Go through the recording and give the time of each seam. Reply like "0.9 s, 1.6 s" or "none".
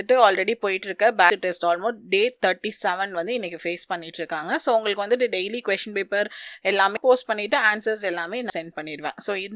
1.3 s, 7.0 s, 8.5 s